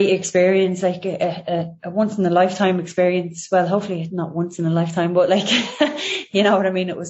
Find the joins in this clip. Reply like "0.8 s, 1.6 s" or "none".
none

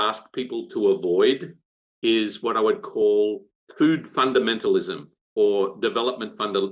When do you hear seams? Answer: 3.5 s

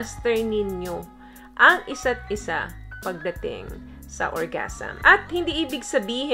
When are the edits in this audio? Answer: 4.9 s

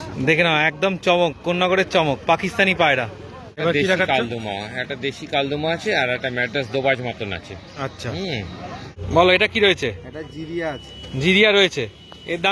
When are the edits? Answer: 3.6 s, 9.0 s

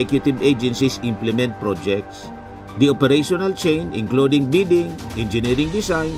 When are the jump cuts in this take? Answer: none

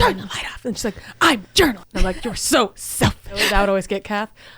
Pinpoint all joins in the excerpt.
1.9 s, 3.4 s

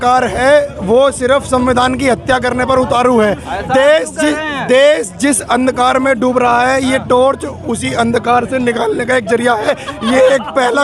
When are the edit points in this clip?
none

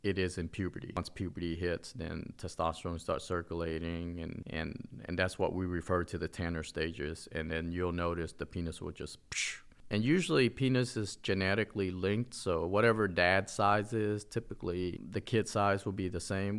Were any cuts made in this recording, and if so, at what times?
1.0 s, 9.6 s, 15.0 s

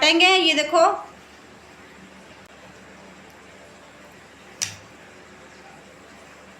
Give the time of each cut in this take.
2.5 s

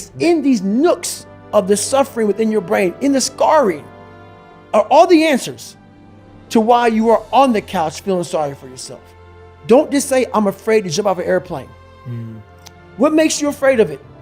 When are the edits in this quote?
none

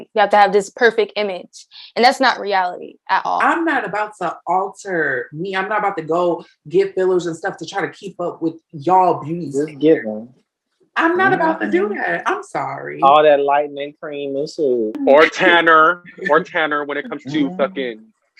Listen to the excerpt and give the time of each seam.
3.4 s, 15.0 s

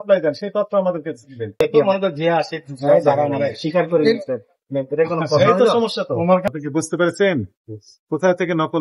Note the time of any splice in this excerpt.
1.5 s, 6.4 s

